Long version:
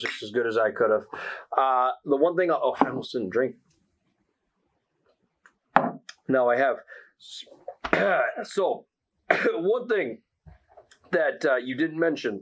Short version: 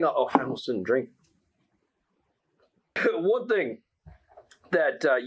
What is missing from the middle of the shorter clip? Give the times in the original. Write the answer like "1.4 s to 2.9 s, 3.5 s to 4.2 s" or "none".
5.5 s to 9.4 s